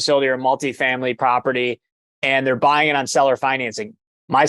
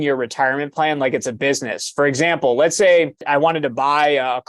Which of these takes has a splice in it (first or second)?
second